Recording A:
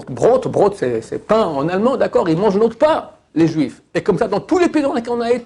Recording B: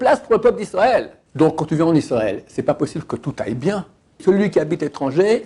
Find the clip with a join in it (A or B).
B